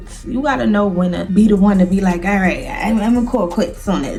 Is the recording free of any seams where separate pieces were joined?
yes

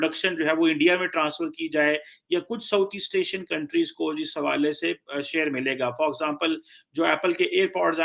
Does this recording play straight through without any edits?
yes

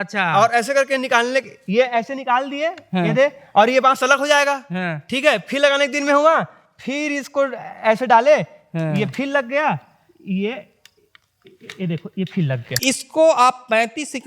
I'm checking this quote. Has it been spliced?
yes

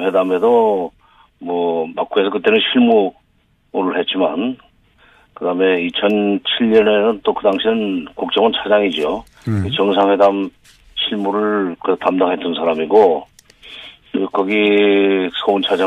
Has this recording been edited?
yes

